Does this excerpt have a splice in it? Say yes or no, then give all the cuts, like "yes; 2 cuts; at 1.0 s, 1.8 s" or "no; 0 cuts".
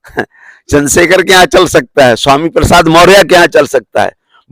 no; 0 cuts